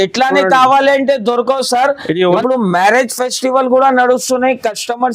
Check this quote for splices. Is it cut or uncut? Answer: cut